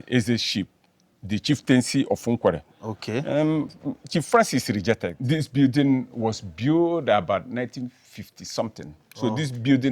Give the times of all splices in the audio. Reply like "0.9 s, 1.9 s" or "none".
5.1 s